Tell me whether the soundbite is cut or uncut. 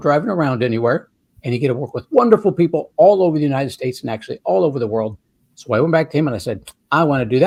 uncut